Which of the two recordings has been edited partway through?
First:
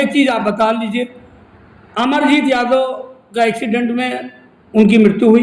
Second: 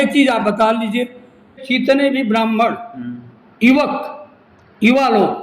second; 1 cut; at 1.8 s

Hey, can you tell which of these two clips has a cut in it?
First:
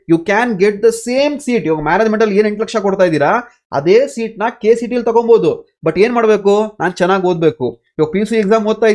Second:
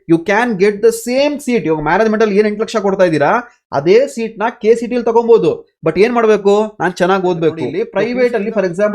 second; 1 cut; at 7.9 s

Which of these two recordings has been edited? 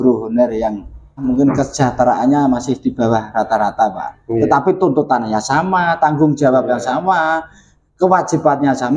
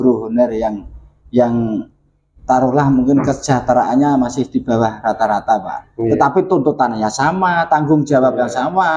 first; 1 cut; at 1.2 s

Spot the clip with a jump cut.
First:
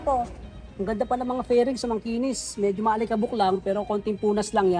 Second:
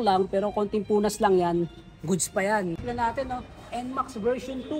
second; 1 cut; at 2.8 s

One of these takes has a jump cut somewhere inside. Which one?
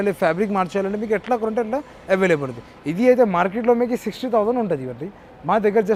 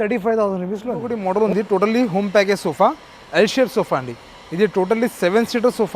second; 1 cut; at 1.5 s

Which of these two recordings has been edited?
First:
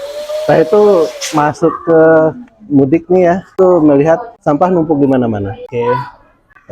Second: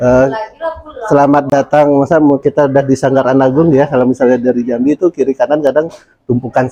first; 3 cuts; at 3.5 s, 4.3 s, 5.6 s

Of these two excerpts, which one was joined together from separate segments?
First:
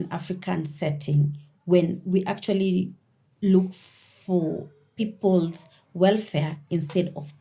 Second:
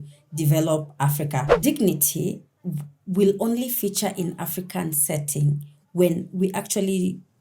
second; 1 cut; at 1.5 s

